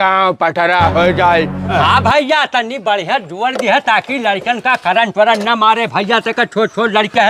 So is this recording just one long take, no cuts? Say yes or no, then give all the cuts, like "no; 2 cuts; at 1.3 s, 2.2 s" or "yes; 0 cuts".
no; 1 cut; at 1.7 s